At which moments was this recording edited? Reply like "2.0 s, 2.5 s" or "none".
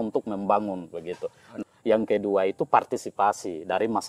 1.5 s